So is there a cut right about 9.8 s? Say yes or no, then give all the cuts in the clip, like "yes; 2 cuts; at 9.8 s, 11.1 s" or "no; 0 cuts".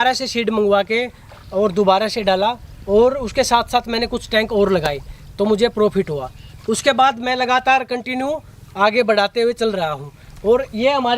no; 0 cuts